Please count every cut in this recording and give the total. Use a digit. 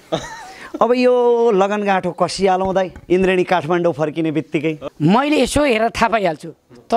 1